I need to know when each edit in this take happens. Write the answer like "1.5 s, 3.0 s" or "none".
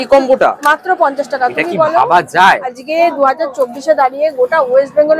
2.7 s